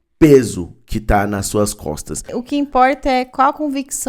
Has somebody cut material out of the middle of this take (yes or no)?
yes